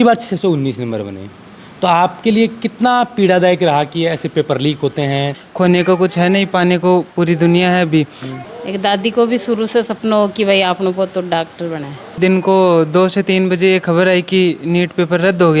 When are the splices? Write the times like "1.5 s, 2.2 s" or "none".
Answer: 5.4 s, 8.4 s, 12.1 s

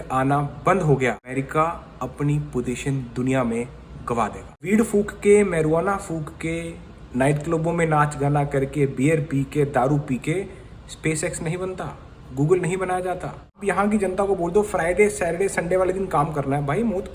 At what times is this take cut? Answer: 1.3 s, 4.6 s, 13.6 s

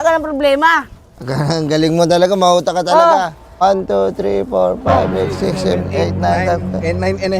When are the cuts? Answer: 3.6 s

